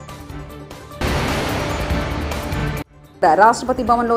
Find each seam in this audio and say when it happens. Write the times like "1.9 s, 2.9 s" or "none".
1.0 s, 3.0 s

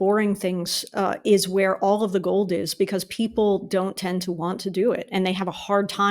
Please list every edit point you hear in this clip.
none

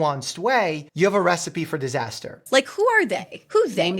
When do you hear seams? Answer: 2.4 s

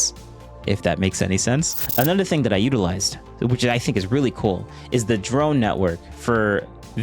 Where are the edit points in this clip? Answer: 1.8 s

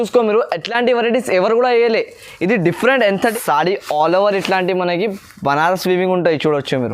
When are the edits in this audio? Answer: 3.3 s

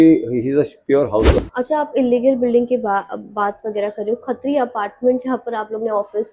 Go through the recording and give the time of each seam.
1.5 s

